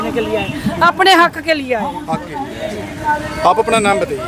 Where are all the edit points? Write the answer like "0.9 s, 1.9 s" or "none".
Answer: none